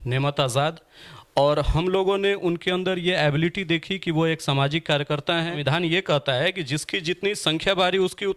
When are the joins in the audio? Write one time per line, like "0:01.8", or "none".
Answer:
0:05.6